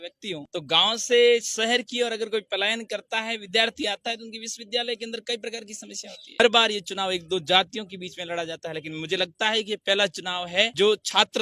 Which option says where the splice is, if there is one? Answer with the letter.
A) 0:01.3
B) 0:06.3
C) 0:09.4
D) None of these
B